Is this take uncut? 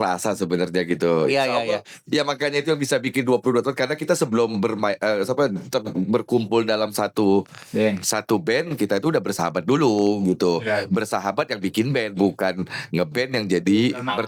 yes; 0 cuts

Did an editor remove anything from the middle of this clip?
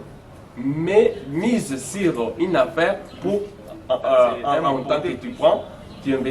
yes; 1 cut; at 4.7 s

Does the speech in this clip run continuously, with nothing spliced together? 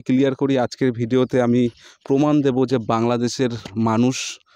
yes; 0 cuts

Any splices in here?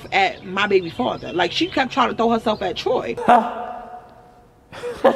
yes; 1 cut; at 3.1 s

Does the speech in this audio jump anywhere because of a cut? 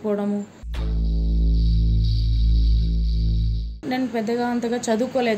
yes; 1 cut; at 3.7 s

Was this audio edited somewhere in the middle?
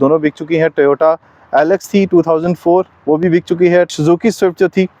no; 0 cuts

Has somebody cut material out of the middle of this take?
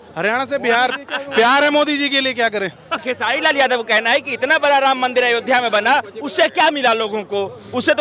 yes; 1 cut; at 3.0 s

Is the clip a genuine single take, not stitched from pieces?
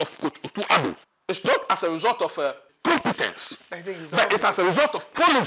no; 2 cuts; at 1.1 s, 2.7 s

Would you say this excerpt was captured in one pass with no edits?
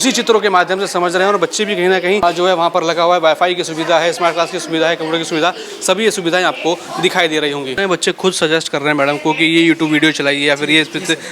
yes; 0 cuts

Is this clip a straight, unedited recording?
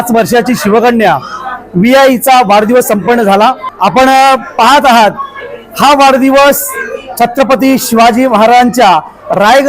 no; 1 cut; at 3.7 s

